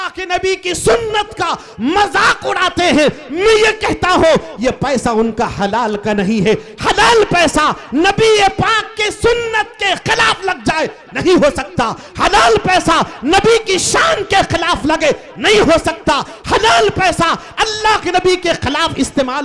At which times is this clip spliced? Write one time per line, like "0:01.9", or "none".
none